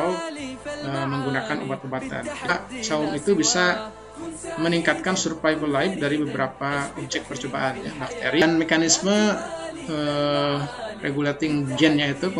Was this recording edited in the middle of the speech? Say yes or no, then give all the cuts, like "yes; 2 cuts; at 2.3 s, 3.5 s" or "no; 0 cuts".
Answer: yes; 2 cuts; at 2.5 s, 8.4 s